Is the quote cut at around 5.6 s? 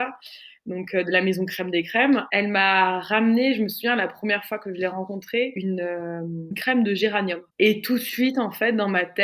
yes; 2 cuts; at 2.3 s, 5.6 s

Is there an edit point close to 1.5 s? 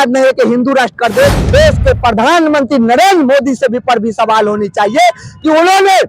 yes; 1 cut; at 1.5 s

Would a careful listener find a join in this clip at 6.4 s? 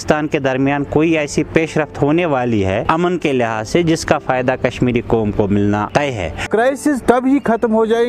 yes; 2 cuts; at 2.8 s, 6.4 s

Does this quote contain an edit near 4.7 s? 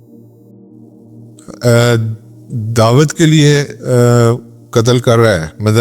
no; 1 cut; at 1.5 s

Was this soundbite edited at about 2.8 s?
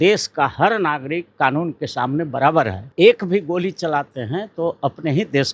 yes; 1 cut; at 2.8 s

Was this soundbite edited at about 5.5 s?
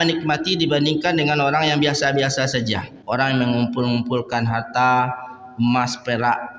no; 1 cut; at 2.9 s

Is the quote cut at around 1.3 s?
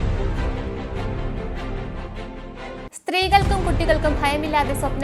no; 1 cut; at 2.9 s

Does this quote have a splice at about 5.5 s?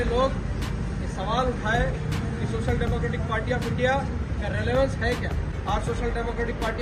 yes; 1 cut; at 5.5 s

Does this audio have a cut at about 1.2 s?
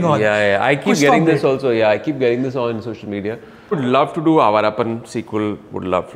no; 1 cut; at 3.8 s

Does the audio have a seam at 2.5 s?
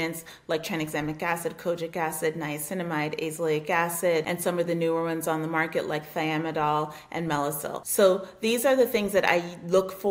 no; 2 cuts; at 4.3 s, 7.8 s

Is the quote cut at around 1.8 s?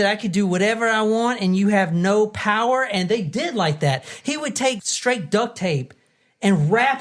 no; 1 cut; at 4.8 s

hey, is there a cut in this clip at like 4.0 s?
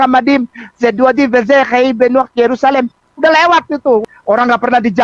yes; 1 cut; at 4.0 s

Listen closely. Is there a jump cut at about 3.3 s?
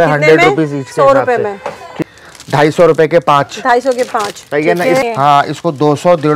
no; 2 cuts; at 2.0 s, 5.0 s

